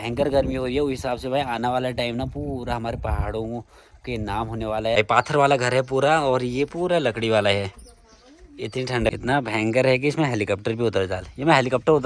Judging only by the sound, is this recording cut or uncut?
cut